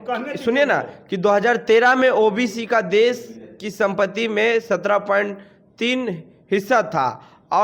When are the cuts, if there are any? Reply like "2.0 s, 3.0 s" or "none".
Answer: none